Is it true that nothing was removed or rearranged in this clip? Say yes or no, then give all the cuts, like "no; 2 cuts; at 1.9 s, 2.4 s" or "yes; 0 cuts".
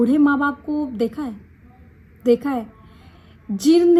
yes; 0 cuts